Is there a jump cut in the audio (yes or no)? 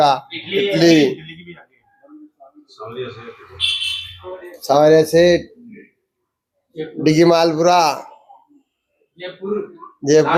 no